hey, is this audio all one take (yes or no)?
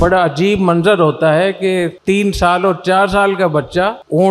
yes